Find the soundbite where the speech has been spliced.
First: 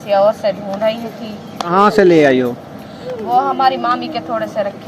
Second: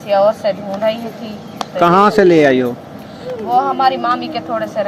first; 1 cut; at 1.7 s

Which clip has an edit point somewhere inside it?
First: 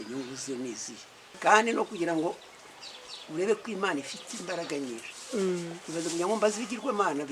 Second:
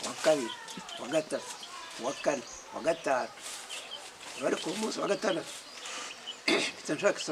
first; 1 cut; at 1.3 s

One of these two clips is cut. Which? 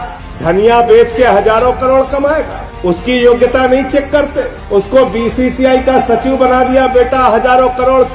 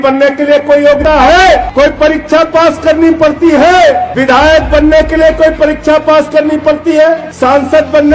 second; 4 cuts; at 1.0 s, 1.7 s, 4.1 s, 7.3 s

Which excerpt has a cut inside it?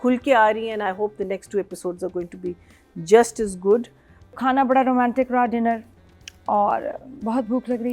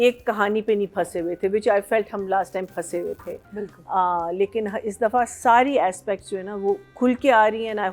first; 1 cut; at 4.4 s

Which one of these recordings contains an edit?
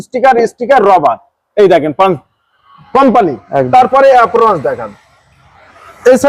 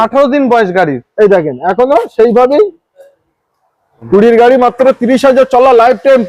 second; 1 cut; at 4.0 s

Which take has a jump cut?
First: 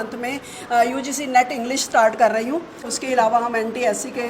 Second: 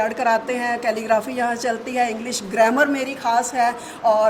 first; 1 cut; at 2.9 s

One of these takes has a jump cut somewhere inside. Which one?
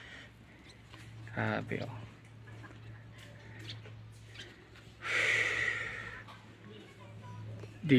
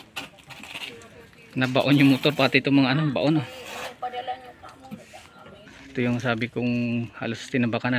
second; 1 cut; at 5.8 s

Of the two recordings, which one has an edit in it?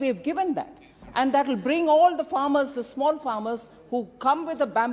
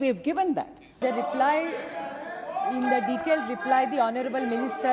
second; 1 cut; at 1.0 s

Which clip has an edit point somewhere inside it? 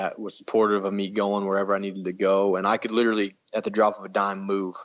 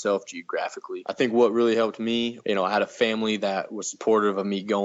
second; 2 cuts; at 0.9 s, 2.3 s

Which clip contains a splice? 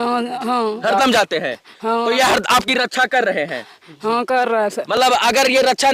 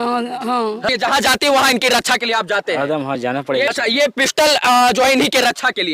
second; 2 cuts; at 0.9 s, 3.7 s

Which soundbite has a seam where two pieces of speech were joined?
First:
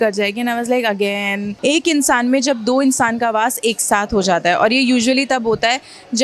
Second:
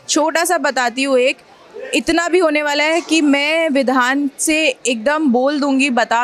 first; 1 cut; at 1.5 s

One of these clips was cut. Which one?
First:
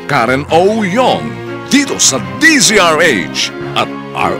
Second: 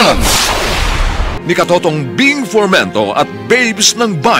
second; 1 cut; at 1.3 s

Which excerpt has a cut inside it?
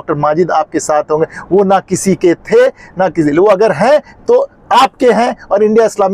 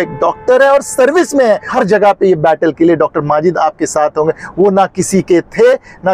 second; 1 cut; at 1.7 s

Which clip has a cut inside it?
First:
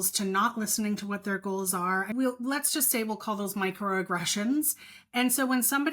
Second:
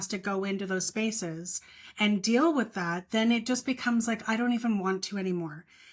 first; 1 cut; at 2.1 s

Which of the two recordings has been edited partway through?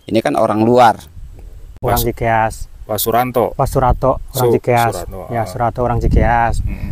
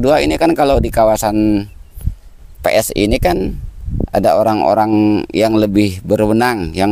first; 1 cut; at 1.7 s

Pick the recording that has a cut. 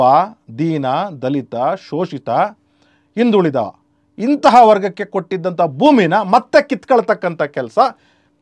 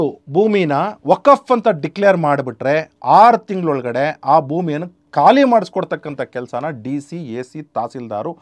second; 1 cut; at 5.0 s

